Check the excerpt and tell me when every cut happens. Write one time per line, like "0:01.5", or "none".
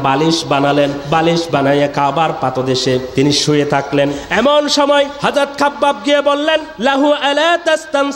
0:01.0
0:03.1
0:04.2
0:05.2
0:06.7